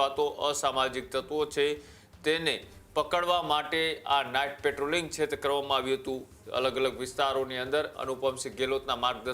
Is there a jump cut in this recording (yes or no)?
no